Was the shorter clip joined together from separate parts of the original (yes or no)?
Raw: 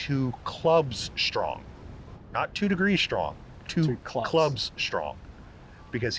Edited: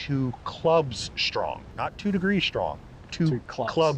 yes